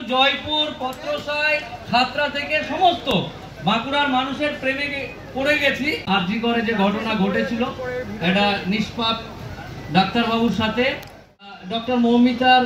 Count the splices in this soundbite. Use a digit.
2